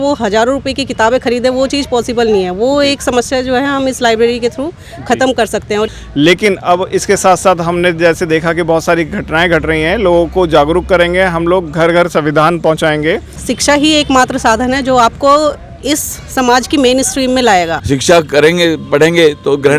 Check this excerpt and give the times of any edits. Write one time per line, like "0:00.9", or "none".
0:05.9
0:13.5
0:17.8